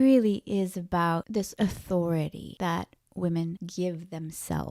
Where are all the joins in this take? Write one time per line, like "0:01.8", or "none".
0:01.4
0:02.4
0:03.6

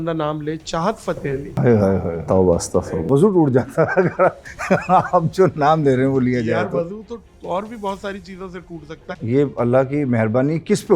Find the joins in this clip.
0:01.5
0:03.0
0:09.1

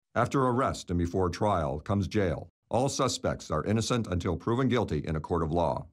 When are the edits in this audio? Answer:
0:02.5

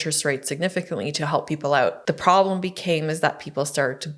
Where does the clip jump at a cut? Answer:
0:02.0

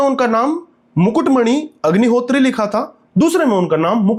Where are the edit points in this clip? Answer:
none

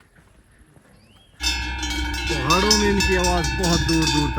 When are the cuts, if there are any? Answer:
0:01.4

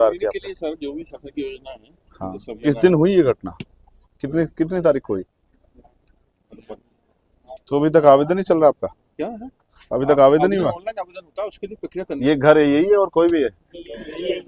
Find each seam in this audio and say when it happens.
0:02.7
0:07.3
0:12.2

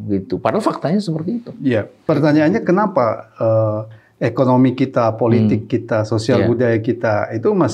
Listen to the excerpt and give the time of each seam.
0:02.0

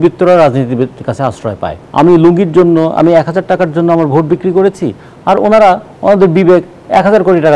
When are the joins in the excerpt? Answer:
0:01.8

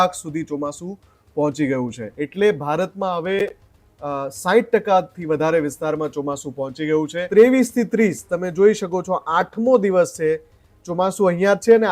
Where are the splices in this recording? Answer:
0:02.0
0:07.2

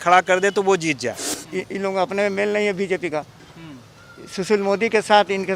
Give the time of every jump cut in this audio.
0:01.4

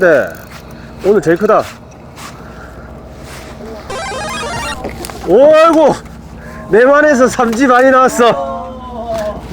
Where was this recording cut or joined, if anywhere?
none

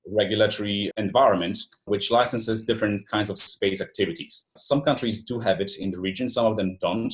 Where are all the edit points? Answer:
0:00.8
0:01.9
0:04.6

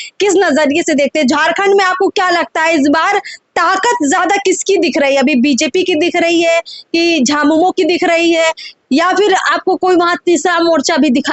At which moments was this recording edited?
none

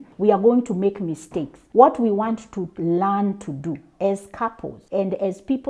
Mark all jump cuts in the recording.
none

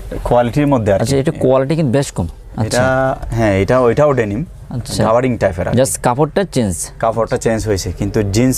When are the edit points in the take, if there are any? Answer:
none

